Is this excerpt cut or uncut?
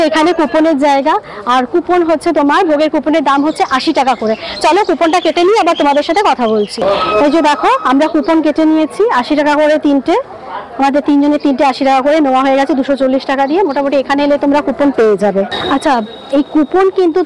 uncut